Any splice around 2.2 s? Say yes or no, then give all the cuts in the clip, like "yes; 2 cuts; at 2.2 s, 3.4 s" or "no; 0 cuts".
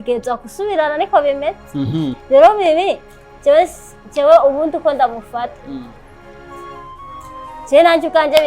yes; 1 cut; at 2.2 s